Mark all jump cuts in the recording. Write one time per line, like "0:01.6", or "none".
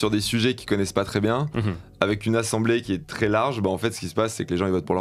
none

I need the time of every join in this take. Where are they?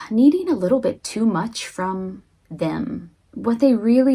0:03.2

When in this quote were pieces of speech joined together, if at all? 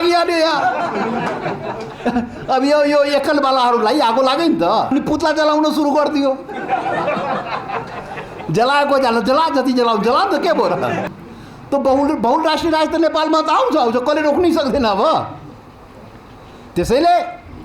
0:04.9
0:11.1

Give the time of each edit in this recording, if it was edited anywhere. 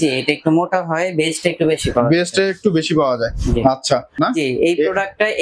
0:04.1

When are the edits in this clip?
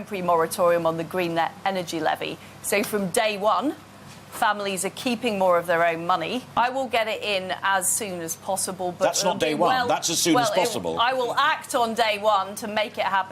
0:06.5

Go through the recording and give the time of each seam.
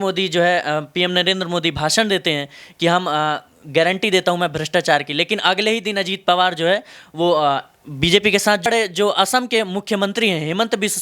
0:08.7

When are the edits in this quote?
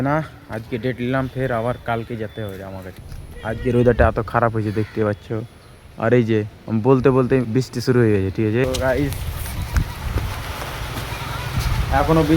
0:02.9
0:08.6

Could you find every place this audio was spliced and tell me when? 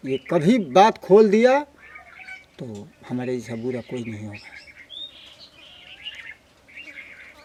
none

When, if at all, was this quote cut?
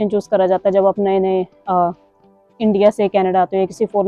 none

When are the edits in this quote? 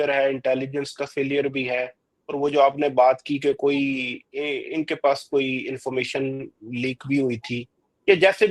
none

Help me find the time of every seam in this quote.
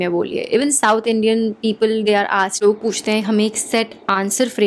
0:02.6

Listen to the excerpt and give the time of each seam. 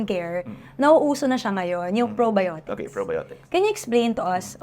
0:03.3

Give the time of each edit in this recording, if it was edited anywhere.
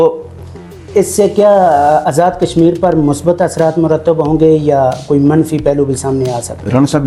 none

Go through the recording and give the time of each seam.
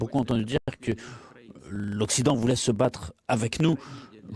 none

